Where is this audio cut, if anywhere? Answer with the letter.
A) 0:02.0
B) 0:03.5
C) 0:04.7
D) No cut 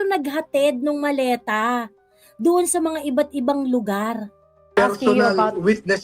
C